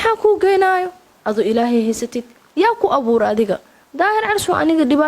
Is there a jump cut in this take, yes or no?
yes